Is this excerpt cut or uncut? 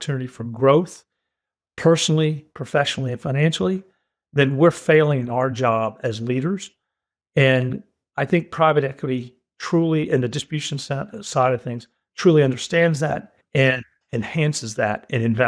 uncut